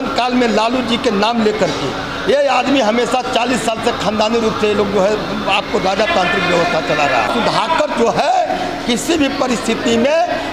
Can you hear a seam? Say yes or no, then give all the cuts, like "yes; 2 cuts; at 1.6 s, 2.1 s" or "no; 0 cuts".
yes; 1 cut; at 7.3 s